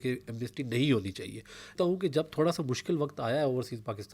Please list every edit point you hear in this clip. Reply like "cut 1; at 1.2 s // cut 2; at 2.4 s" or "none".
cut 1; at 1.7 s

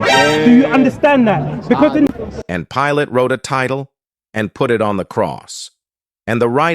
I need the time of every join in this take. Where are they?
cut 1; at 2.1 s

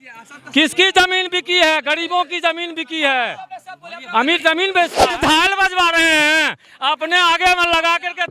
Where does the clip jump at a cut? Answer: cut 1; at 5.2 s

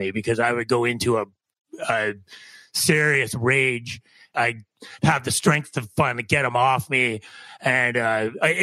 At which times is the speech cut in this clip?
cut 1; at 4.3 s

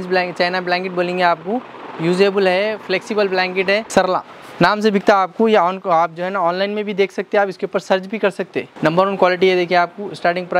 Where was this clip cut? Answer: cut 1; at 3.9 s // cut 2; at 8.6 s

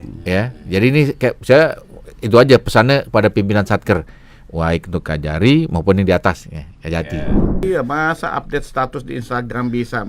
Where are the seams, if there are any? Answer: cut 1; at 7.6 s

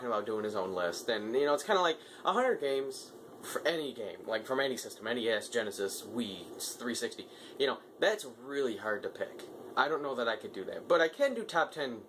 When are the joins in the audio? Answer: none

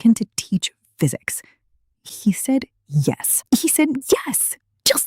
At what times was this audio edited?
cut 1; at 2.1 s // cut 2; at 3.3 s

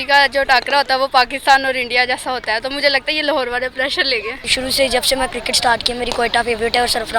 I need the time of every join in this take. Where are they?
cut 1; at 4.5 s

